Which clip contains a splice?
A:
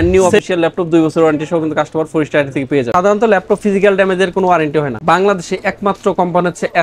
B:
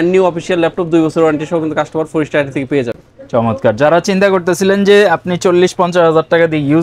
A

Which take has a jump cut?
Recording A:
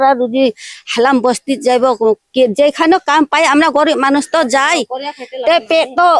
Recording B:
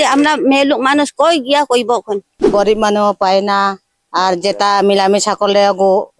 B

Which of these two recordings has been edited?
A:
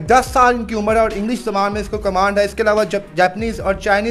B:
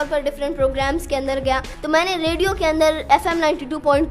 B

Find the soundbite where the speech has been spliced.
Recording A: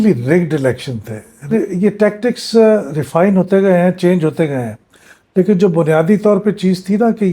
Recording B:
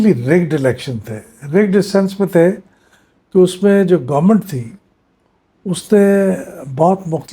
A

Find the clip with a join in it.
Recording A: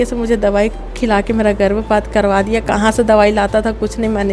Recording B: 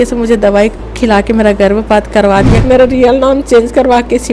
B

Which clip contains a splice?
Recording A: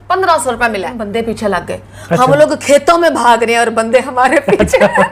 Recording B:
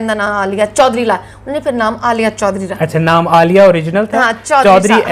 A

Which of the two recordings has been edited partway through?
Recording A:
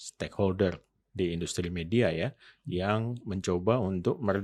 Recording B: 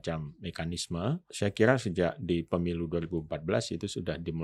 B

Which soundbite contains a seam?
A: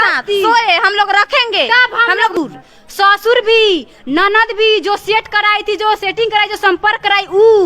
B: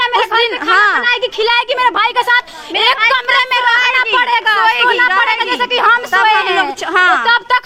A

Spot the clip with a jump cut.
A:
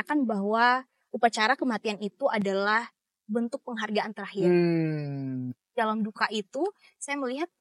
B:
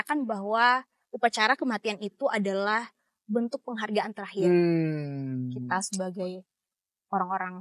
A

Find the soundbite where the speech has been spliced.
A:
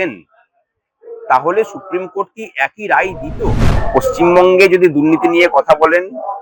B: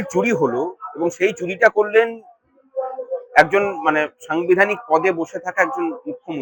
A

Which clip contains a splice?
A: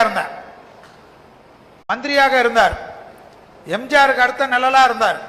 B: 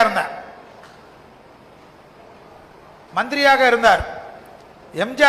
A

